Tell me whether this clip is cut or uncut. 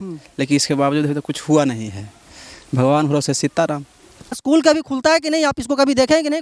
cut